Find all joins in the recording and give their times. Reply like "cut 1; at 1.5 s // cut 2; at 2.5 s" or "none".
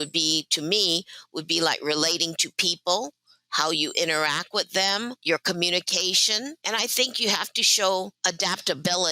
cut 1; at 5.2 s // cut 2; at 6.6 s // cut 3; at 8.1 s